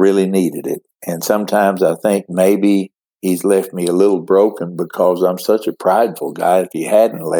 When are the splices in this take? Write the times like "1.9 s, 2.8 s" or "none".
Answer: none